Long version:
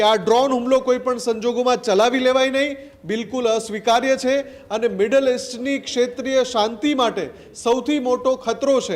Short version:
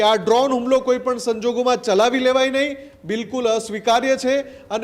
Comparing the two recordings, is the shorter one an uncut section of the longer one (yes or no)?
yes